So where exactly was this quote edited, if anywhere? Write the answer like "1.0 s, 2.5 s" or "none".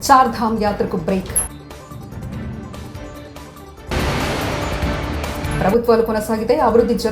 none